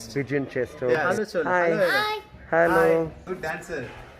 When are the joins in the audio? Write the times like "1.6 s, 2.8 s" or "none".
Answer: 1.1 s, 3.2 s